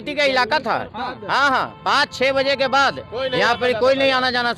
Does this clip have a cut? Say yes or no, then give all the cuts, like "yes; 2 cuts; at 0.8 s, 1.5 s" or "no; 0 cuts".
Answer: no; 0 cuts